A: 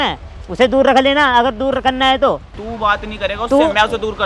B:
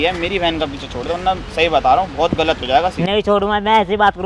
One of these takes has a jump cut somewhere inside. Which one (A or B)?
A